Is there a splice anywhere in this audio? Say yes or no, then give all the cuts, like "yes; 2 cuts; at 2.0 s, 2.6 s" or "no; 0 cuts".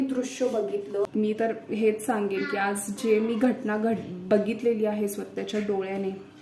yes; 1 cut; at 1.1 s